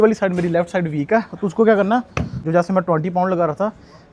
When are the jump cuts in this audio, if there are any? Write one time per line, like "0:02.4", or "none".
0:02.3